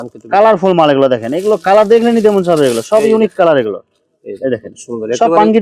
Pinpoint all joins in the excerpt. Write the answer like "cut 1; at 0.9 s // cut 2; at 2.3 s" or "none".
none